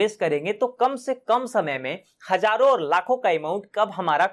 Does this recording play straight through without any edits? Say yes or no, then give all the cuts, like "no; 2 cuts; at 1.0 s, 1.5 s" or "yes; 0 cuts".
yes; 0 cuts